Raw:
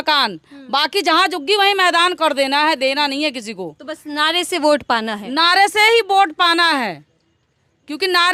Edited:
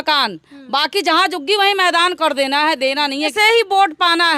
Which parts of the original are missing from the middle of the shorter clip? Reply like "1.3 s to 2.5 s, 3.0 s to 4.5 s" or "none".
3.3 s to 5.7 s